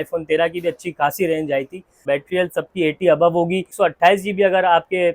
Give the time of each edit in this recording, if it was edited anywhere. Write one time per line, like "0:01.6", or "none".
0:02.0
0:03.7